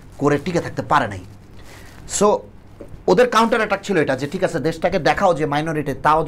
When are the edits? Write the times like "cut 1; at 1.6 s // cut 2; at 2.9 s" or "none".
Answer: none